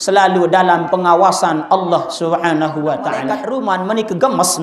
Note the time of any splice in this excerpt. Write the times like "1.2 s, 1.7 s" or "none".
3.4 s

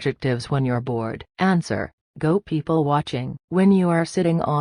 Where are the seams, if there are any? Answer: none

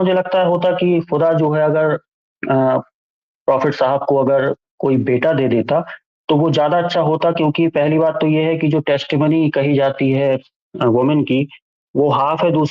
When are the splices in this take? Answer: none

